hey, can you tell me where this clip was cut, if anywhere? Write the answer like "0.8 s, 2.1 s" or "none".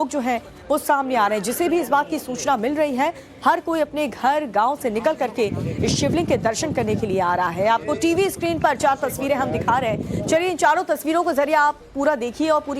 4.8 s